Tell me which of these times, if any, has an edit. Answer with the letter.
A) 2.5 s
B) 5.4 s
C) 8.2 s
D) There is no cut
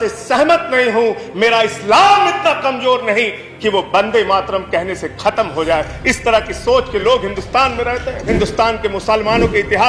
C